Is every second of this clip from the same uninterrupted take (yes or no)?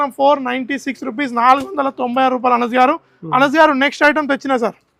yes